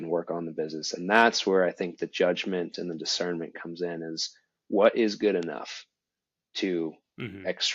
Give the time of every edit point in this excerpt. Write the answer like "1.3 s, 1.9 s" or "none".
none